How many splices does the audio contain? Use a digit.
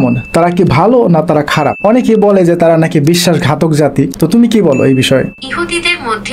3